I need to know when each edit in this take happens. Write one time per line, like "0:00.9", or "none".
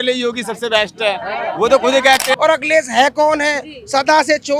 0:02.4